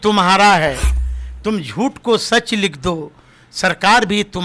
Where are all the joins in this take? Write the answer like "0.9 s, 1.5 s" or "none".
none